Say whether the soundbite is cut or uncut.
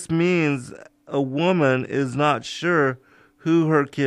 cut